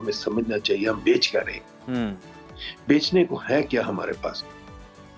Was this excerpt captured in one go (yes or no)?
yes